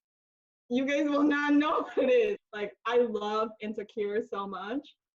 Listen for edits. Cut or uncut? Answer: cut